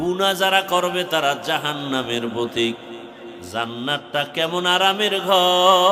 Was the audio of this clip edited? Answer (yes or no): no